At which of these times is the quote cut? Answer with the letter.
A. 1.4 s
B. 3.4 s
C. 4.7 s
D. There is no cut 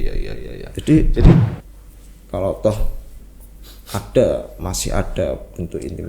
A